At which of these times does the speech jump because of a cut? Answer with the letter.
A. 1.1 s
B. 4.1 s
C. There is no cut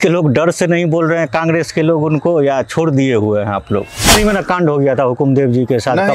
B